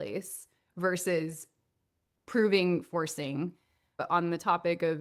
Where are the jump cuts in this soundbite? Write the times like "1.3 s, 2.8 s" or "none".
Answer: 4.0 s

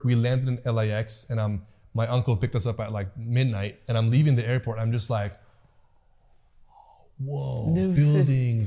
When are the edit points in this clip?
none

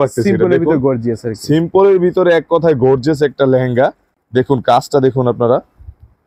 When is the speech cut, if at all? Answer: none

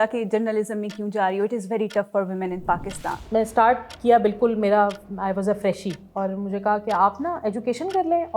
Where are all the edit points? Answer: 3.2 s

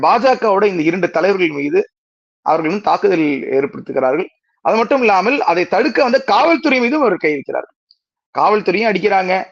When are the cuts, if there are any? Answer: none

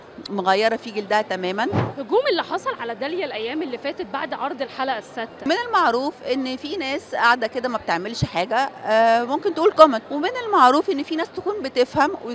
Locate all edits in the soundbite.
1.9 s, 5.5 s, 10.1 s

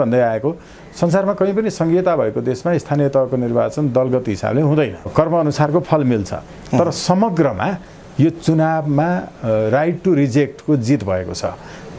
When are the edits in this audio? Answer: 5.1 s

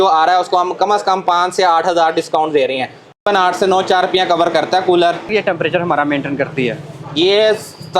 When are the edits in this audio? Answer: 3.2 s, 5.2 s

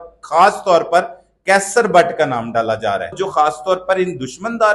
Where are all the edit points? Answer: 3.2 s

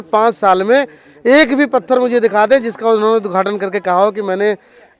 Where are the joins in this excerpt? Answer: none

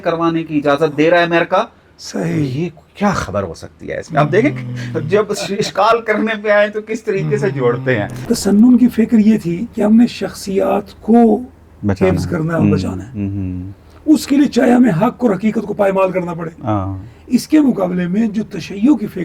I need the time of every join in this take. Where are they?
8.2 s

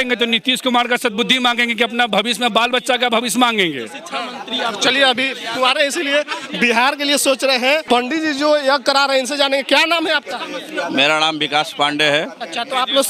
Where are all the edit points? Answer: none

